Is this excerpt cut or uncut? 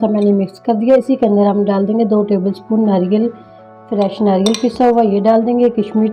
uncut